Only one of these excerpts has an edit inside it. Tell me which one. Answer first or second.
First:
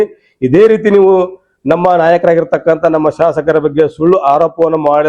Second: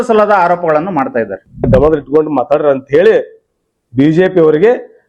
second